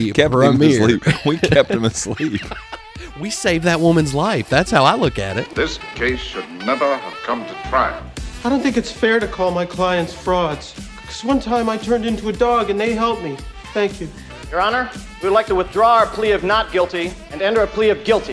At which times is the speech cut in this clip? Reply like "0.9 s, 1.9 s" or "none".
5.4 s